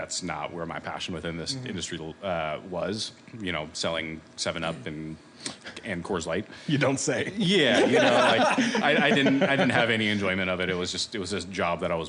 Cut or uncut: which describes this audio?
uncut